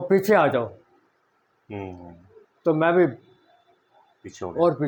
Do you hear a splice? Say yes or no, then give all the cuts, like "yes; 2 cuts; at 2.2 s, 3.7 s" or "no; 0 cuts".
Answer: no; 0 cuts